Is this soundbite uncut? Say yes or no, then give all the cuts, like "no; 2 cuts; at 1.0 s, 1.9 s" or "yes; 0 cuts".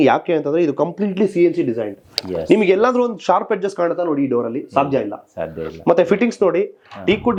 yes; 0 cuts